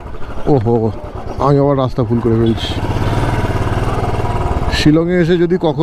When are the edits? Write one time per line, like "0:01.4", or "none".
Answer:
none